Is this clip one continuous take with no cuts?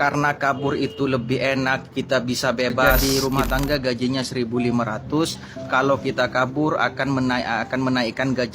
no; 1 cut; at 2.9 s

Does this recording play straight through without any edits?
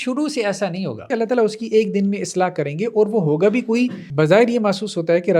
no; 2 cuts; at 1.1 s, 4.0 s

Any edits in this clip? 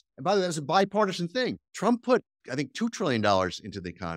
yes; 2 cuts; at 1.6 s, 2.4 s

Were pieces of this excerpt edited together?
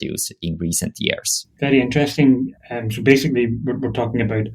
yes; 1 cut; at 1.4 s

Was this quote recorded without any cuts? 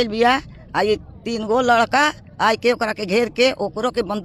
yes; 0 cuts

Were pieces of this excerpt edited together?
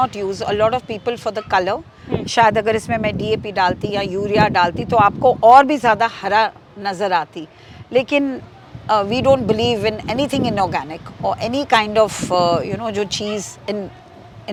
no; 0 cuts

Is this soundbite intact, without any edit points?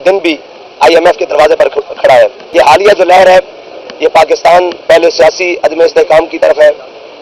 no; 1 cut; at 2.5 s

